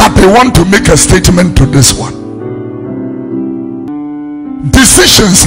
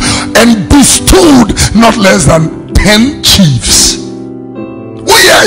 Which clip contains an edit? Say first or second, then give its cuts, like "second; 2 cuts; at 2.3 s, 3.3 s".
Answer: first; 1 cut; at 3.9 s